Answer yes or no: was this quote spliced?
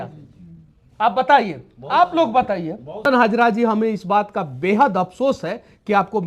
yes